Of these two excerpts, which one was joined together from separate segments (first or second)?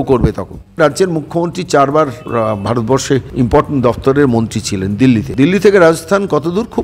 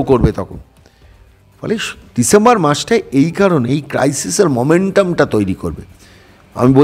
first